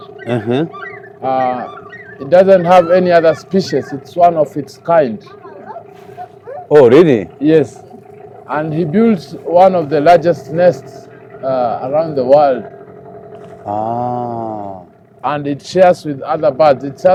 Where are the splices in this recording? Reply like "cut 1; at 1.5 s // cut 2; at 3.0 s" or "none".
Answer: none

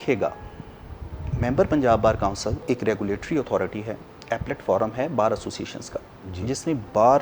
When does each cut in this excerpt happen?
cut 1; at 1.2 s // cut 2; at 2.6 s

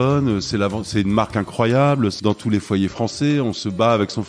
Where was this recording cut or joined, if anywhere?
cut 1; at 2.2 s

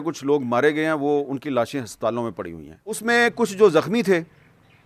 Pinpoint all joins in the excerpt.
cut 1; at 3.0 s

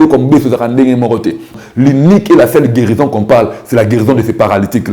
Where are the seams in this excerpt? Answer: cut 1; at 1.5 s

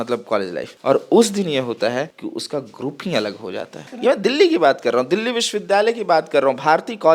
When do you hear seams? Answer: cut 1; at 3.9 s

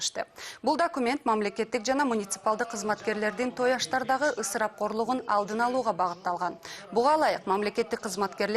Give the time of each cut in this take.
cut 1; at 4.7 s

